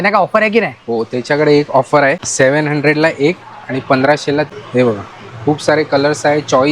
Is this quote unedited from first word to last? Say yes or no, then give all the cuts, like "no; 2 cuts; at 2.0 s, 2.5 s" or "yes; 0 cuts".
no; 2 cuts; at 2.2 s, 4.5 s